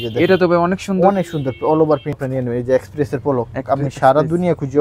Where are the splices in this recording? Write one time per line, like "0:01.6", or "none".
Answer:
0:02.2